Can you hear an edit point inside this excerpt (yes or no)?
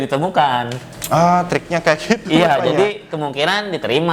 no